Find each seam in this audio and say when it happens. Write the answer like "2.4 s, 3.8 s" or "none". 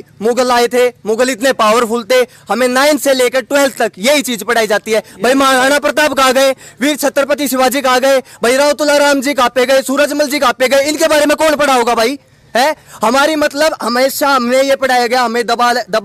none

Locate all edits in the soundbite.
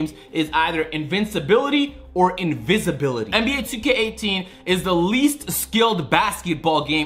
3.2 s

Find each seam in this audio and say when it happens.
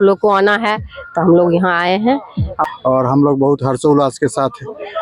2.5 s

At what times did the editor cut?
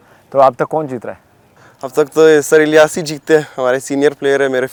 none

